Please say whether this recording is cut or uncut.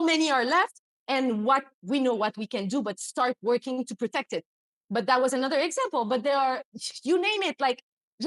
uncut